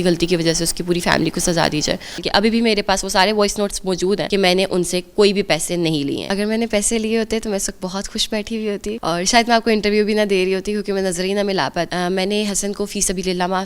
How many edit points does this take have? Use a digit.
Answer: 5